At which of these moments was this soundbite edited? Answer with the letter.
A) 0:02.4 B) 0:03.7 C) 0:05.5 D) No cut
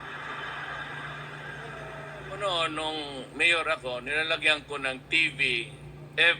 A